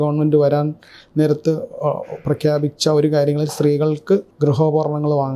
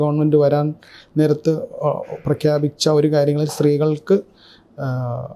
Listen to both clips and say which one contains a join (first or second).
first